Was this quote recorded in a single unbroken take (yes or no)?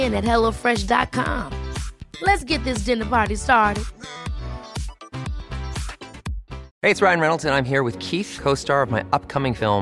no